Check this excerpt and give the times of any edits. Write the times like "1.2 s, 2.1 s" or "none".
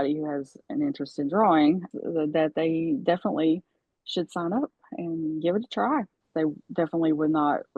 1.9 s, 6.2 s